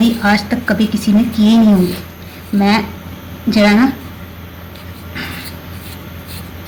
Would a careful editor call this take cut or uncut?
uncut